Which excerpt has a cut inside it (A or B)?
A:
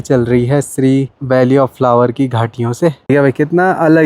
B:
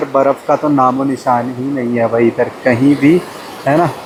A